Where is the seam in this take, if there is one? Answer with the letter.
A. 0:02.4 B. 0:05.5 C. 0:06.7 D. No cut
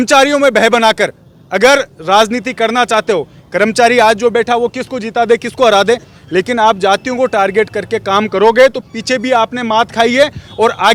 D